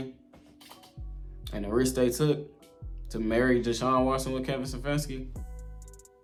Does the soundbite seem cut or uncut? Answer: uncut